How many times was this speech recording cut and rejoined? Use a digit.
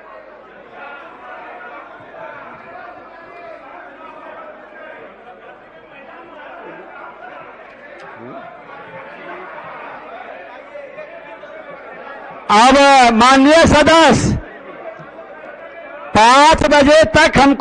1